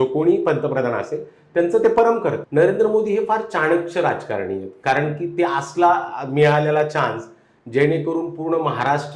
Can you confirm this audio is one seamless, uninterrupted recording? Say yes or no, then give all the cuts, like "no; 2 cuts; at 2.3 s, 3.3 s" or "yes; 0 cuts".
no; 1 cut; at 2.4 s